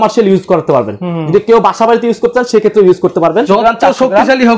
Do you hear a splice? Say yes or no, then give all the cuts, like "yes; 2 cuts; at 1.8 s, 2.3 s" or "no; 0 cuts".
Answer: yes; 1 cut; at 3.5 s